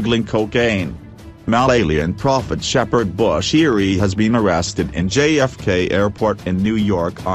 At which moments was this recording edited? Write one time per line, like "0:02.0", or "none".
0:01.5

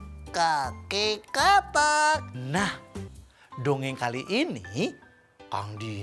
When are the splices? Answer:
0:02.4

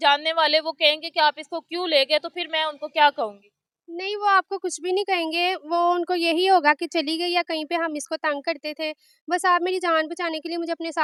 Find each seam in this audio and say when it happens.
none

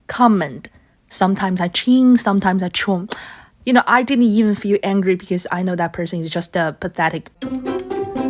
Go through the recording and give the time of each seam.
0:07.3

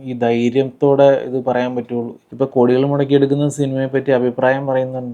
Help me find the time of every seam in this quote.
0:02.2

